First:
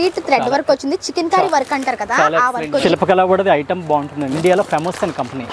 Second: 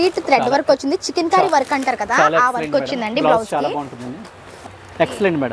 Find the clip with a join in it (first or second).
first